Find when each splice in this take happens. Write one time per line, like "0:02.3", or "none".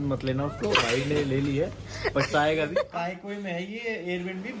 0:02.8